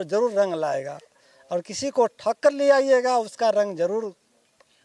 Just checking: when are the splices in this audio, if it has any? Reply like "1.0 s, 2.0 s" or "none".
none